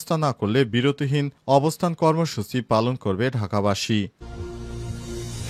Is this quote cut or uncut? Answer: cut